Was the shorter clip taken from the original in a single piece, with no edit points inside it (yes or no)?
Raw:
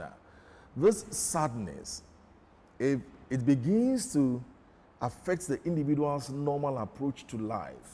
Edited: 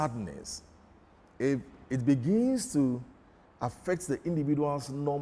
yes